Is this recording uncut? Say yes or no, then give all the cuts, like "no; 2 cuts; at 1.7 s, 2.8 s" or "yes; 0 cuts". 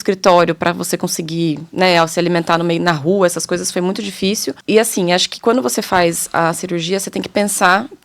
no; 1 cut; at 4.5 s